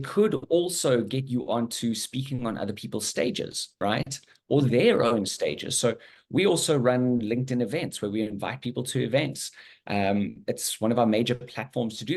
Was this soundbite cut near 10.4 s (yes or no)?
no